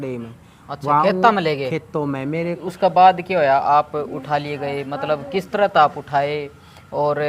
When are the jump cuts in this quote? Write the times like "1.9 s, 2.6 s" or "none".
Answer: 2.6 s